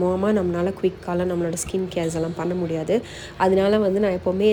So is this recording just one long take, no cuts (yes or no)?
yes